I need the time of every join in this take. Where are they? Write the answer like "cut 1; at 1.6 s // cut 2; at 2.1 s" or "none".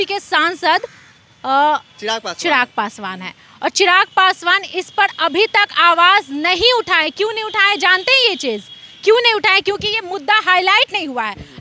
none